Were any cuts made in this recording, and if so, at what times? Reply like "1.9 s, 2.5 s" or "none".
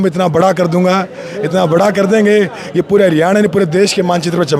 none